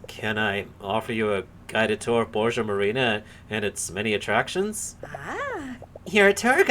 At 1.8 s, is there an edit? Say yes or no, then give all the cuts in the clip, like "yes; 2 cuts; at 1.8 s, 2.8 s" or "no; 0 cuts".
no; 1 cut; at 5.0 s